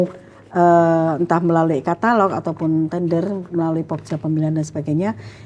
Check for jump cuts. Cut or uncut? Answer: uncut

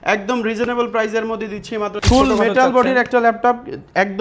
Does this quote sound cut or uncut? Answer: cut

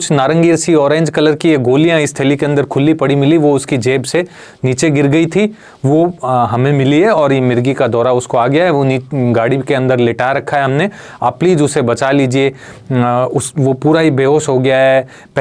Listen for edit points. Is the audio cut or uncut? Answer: uncut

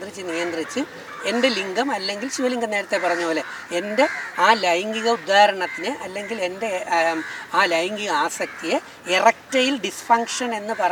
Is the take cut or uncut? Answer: uncut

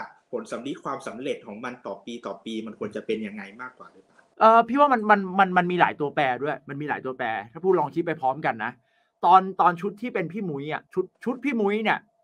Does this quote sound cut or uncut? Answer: uncut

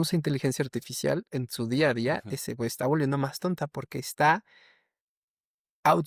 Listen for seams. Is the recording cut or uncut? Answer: uncut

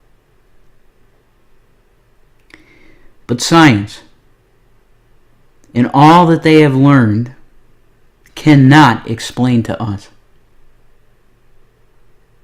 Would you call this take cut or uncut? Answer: cut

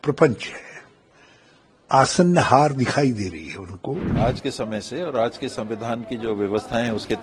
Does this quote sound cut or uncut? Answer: cut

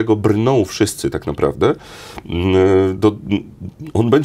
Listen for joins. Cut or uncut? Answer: uncut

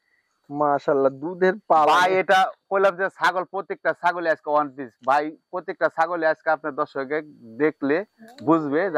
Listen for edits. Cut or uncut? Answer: uncut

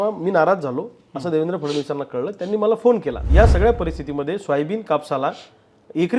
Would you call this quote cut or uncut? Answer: cut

